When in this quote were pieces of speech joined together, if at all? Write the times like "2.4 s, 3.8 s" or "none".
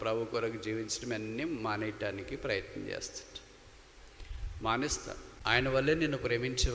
5.3 s